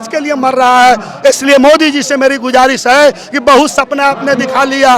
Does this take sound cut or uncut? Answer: uncut